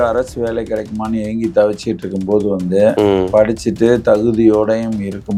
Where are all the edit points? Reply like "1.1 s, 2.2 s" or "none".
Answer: none